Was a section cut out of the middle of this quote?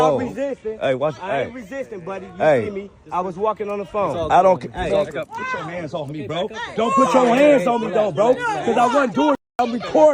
no; 0 cuts

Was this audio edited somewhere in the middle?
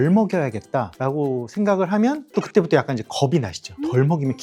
no; 0 cuts

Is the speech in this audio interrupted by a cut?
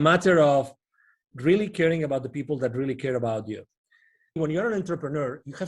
yes; 1 cut; at 4.4 s

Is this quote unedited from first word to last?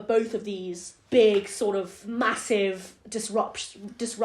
no; 1 cut; at 2.0 s

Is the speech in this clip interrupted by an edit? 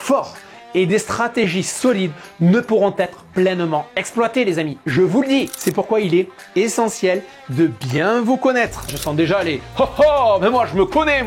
yes; 2 cuts; at 5.5 s, 9.0 s

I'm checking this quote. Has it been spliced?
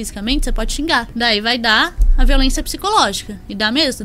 yes; 1 cut; at 1.1 s

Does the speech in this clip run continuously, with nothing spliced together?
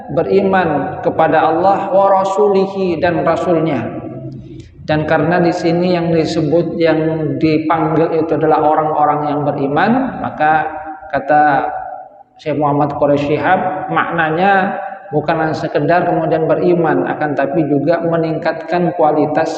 yes; 0 cuts

